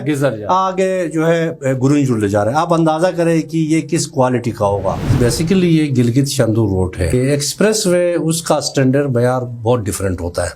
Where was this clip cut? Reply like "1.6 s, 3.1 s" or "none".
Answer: 5.2 s, 7.1 s